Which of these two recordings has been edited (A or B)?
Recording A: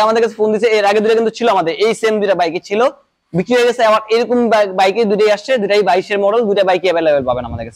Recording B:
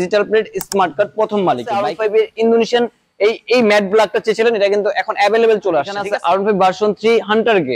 B